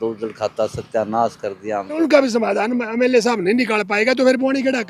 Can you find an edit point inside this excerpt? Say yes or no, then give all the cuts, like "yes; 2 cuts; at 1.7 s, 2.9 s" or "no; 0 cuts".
yes; 1 cut; at 2.0 s